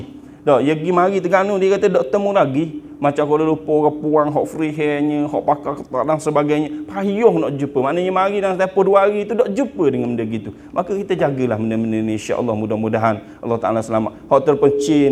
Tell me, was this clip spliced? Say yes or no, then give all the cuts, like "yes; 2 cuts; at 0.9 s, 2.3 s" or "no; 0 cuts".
no; 0 cuts